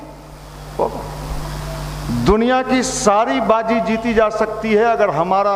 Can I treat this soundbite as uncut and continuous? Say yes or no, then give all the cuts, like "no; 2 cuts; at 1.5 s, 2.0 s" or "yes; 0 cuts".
no; 1 cut; at 1.4 s